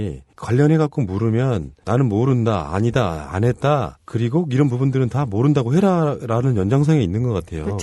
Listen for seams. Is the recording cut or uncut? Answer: cut